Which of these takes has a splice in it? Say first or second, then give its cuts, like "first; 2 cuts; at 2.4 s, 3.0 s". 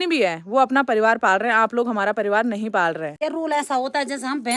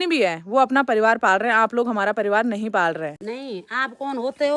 first; 1 cut; at 3.2 s